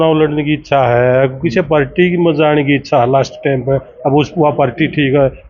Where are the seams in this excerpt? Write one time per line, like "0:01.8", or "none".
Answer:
none